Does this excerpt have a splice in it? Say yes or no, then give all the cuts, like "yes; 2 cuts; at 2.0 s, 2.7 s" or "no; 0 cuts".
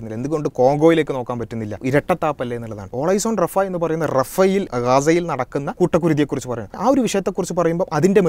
yes; 5 cuts; at 1.8 s, 2.9 s, 4.7 s, 5.7 s, 6.8 s